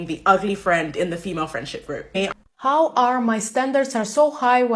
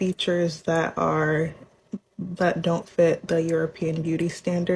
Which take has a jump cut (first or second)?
first